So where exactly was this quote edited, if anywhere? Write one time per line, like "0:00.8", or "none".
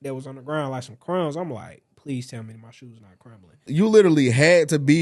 0:03.7